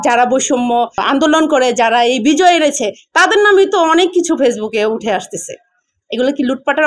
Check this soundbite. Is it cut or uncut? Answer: cut